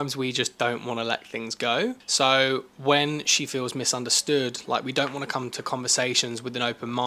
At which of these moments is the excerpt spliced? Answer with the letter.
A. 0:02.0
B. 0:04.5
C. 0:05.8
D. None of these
A